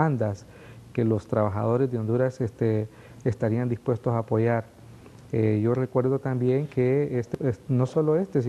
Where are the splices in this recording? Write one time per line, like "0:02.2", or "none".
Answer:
0:01.5

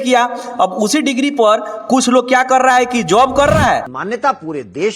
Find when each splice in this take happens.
0:03.9

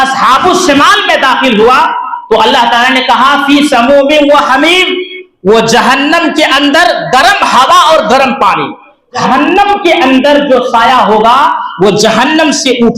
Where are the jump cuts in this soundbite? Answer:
0:09.2

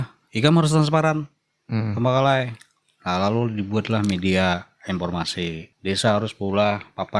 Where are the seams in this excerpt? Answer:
0:05.7

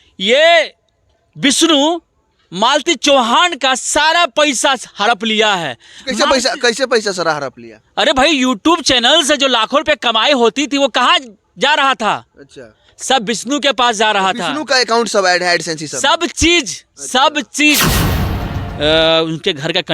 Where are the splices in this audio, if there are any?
0:18.4

